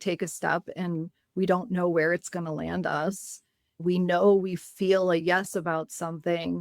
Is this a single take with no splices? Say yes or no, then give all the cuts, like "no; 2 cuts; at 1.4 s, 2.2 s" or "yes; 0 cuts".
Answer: no; 1 cut; at 3.8 s